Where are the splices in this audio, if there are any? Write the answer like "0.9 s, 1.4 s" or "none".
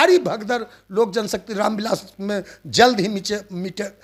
none